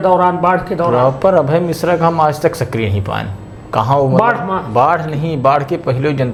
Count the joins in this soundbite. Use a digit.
0